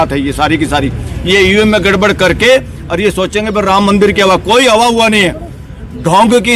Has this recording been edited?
no; 0 cuts

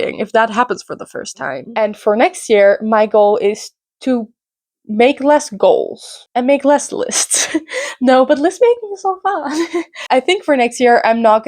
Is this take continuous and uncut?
no; 1 cut; at 1.7 s

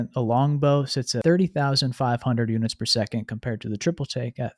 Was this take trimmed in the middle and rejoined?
yes; 1 cut; at 1.1 s

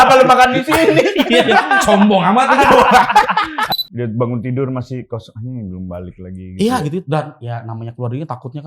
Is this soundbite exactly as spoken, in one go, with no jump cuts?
no; 1 cut; at 3.6 s

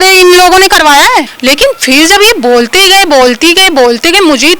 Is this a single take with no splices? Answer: no; 1 cut; at 1.3 s

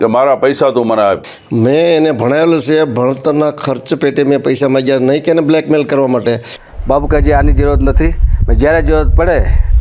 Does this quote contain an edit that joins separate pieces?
yes; 2 cuts; at 1.3 s, 6.5 s

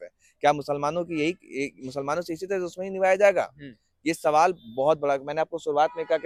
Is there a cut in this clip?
no; 0 cuts

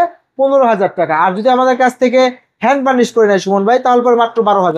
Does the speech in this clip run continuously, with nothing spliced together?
yes; 0 cuts

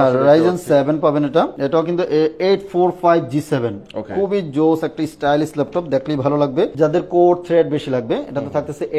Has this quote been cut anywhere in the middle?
yes; 2 cuts; at 1.5 s, 6.7 s

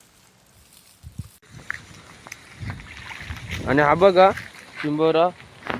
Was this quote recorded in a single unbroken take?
no; 1 cut; at 1.5 s

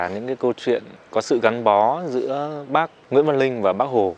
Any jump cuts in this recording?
yes; 2 cuts; at 1.0 s, 3.0 s

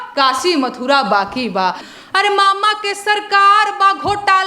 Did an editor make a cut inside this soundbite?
yes; 1 cut; at 1.9 s

